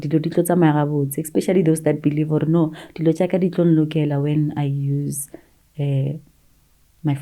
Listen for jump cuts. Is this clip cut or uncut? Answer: uncut